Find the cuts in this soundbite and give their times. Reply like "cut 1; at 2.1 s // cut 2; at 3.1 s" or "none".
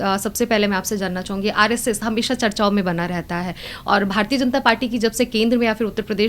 none